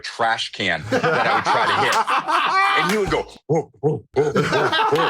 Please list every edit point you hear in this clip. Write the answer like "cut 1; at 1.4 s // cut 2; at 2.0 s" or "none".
cut 1; at 2.8 s